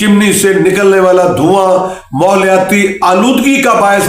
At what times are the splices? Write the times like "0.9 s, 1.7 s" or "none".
none